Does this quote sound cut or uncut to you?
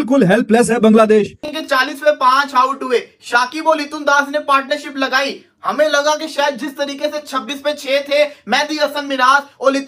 cut